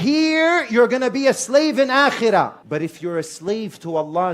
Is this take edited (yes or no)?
yes